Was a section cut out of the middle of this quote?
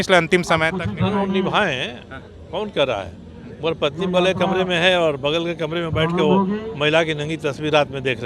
no; 0 cuts

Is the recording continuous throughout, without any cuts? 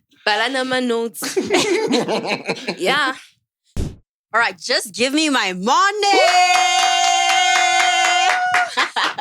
no; 1 cut; at 3.8 s

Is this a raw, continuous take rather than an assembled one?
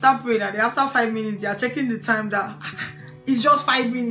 yes; 0 cuts

